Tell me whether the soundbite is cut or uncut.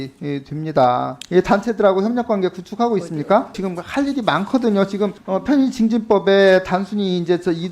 cut